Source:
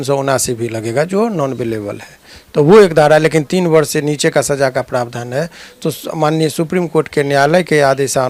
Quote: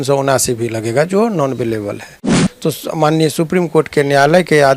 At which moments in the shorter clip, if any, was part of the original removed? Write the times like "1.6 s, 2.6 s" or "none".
2.4 s